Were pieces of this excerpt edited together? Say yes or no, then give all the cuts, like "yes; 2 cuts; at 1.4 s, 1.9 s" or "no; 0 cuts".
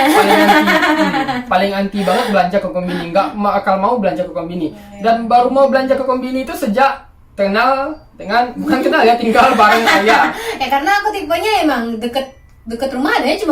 no; 0 cuts